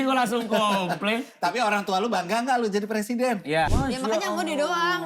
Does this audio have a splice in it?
yes; 1 cut; at 3.7 s

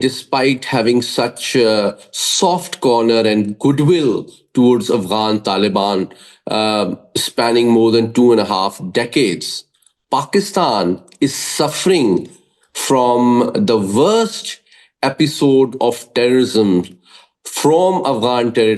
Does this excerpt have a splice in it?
no; 0 cuts

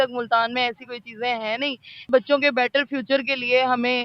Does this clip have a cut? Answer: yes; 1 cut; at 2.1 s

